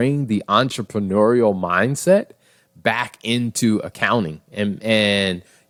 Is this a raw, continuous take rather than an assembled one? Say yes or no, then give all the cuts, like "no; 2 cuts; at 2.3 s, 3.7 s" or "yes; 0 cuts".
yes; 0 cuts